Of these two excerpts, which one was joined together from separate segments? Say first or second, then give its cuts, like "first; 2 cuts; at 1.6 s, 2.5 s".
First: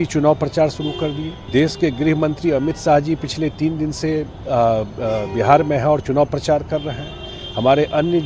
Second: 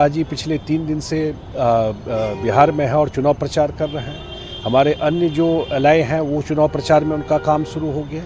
first; 1 cut; at 1.3 s